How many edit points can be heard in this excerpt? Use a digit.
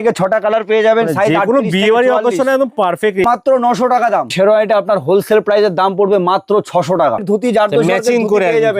3